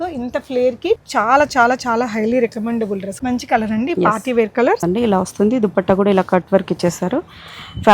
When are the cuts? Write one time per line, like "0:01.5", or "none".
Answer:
0:01.0
0:03.2
0:04.8